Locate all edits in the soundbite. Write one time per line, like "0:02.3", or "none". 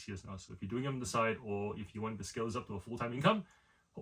none